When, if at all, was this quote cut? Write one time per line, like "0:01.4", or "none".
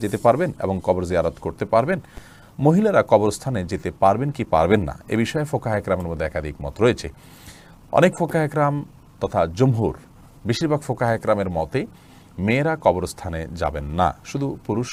none

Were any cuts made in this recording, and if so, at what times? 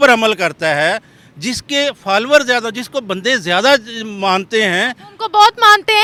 none

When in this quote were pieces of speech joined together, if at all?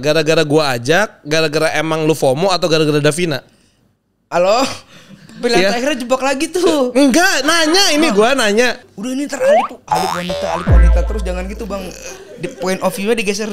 0:08.9

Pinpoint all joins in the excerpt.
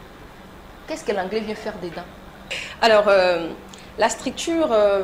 0:02.6

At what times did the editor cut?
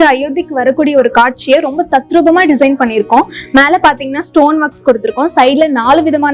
none

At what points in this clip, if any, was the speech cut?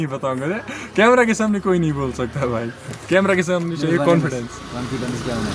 none

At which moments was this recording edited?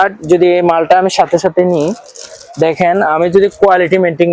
none

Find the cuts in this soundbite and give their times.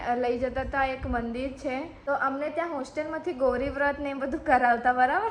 0:01.9

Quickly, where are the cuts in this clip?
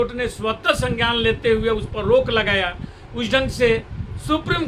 none

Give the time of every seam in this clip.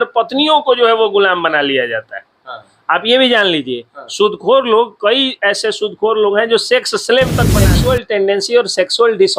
0:07.6

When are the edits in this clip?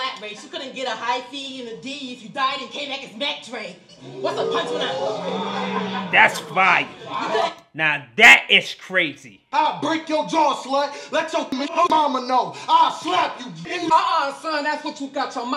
0:09.5

